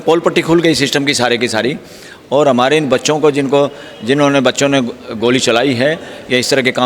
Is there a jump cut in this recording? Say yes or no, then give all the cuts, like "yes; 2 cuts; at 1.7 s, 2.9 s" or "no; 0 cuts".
no; 0 cuts